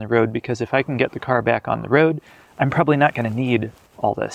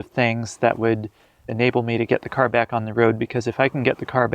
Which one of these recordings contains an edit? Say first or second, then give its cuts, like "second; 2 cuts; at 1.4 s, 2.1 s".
second; 1 cut; at 1.4 s